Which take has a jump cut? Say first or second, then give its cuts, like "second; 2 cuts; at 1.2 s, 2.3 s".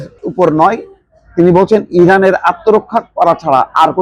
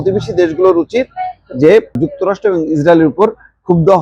second; 1 cut; at 2.0 s